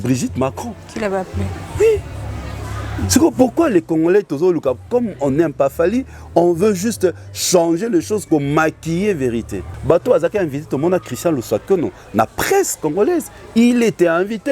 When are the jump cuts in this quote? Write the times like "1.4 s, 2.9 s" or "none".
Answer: 9.7 s